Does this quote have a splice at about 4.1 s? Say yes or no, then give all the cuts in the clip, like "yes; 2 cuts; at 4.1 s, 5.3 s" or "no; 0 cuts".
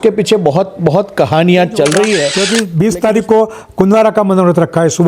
no; 1 cut; at 2.4 s